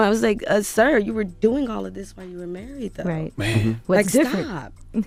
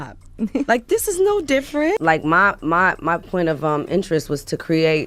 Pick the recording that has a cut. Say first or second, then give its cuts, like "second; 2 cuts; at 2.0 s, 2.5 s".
second; 1 cut; at 2.0 s